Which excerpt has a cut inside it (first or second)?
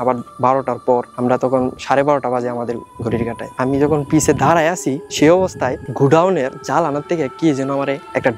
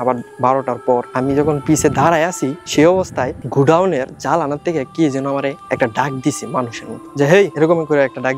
second